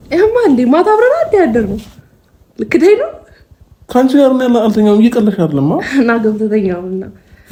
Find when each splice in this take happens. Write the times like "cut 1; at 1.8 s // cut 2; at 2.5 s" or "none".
none